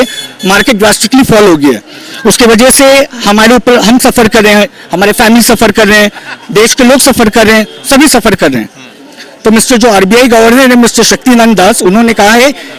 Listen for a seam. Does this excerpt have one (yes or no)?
no